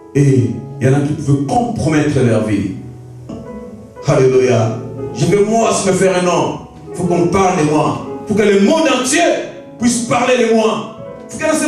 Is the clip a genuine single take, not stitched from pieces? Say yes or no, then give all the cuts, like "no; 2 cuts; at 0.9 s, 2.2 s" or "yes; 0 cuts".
no; 1 cut; at 3.4 s